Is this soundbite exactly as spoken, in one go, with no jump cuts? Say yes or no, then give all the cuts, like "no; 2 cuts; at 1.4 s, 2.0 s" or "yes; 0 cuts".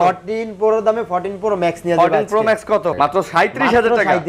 no; 1 cut; at 2.9 s